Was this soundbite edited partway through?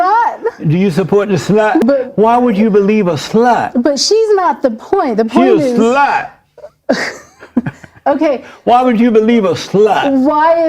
yes; 1 cut; at 1.8 s

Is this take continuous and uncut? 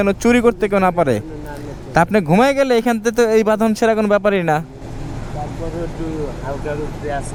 yes; 0 cuts

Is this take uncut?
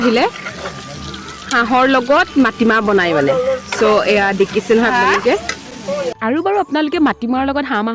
yes; 0 cuts

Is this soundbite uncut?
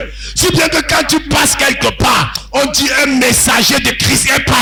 yes; 0 cuts

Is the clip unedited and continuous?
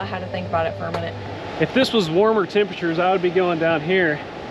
no; 1 cut; at 1.4 s

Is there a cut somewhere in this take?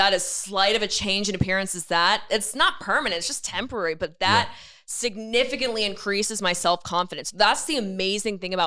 no; 0 cuts

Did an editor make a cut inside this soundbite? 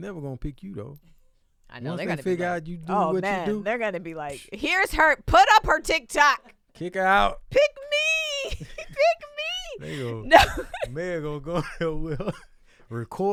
no; 0 cuts

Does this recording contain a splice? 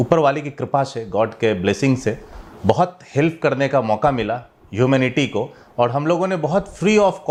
no; 0 cuts

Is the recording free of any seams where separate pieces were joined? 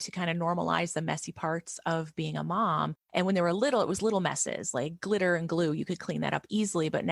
yes; 0 cuts

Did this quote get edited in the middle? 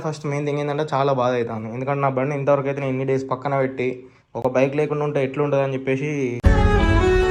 no; 0 cuts

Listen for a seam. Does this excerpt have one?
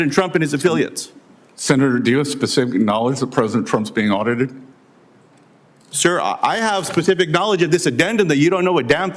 yes; 1 cut; at 1.1 s

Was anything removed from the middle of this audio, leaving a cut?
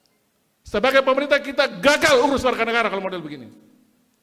no; 0 cuts

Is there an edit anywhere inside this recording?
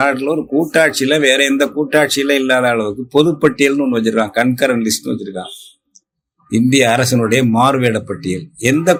no; 0 cuts

